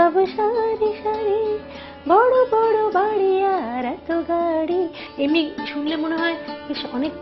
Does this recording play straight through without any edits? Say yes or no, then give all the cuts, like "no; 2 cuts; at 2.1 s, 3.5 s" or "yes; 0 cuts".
no; 1 cut; at 5.0 s